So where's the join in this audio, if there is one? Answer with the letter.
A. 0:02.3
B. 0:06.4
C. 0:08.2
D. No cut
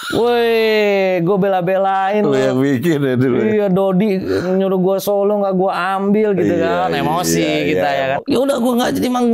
C